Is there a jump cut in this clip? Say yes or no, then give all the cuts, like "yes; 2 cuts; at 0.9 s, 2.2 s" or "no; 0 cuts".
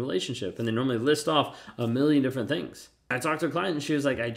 yes; 1 cut; at 3.1 s